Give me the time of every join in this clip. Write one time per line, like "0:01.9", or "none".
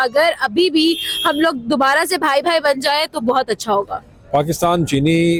none